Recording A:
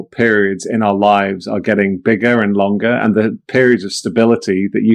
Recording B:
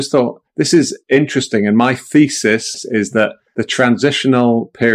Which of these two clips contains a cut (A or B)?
B